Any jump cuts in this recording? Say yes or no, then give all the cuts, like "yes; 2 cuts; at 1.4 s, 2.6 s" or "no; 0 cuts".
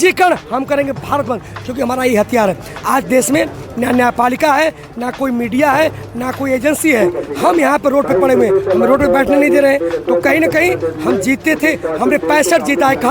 no; 0 cuts